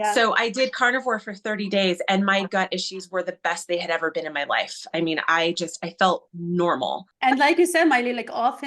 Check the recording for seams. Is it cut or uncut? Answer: cut